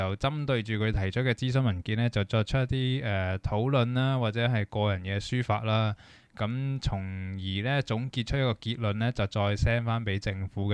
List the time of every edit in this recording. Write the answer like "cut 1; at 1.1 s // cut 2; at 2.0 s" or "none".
none